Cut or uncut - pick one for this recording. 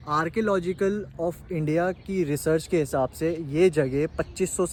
uncut